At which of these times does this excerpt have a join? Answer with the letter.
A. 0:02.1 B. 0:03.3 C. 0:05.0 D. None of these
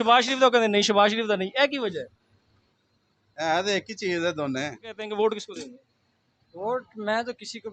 C